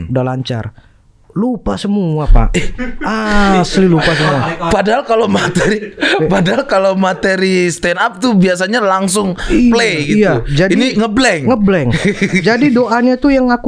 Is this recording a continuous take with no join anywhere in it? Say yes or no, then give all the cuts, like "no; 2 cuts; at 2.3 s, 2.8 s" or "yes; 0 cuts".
yes; 0 cuts